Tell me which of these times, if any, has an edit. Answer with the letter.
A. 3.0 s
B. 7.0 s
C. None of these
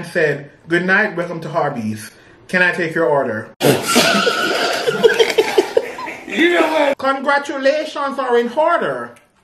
B